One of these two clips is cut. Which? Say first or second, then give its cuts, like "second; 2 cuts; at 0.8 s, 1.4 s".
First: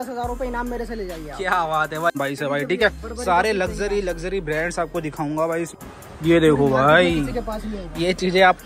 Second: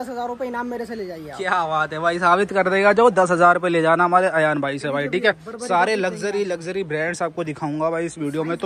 first; 2 cuts; at 2.2 s, 5.7 s